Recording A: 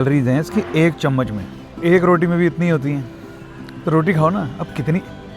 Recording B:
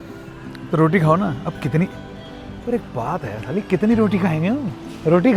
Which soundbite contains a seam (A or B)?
A